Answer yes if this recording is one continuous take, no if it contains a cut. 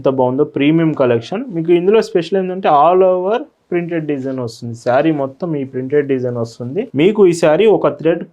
no